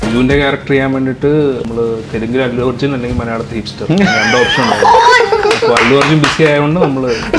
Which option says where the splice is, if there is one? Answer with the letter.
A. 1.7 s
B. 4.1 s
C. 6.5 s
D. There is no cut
A